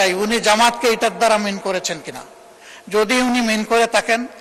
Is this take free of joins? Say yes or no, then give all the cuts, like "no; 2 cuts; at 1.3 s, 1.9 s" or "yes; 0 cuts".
yes; 0 cuts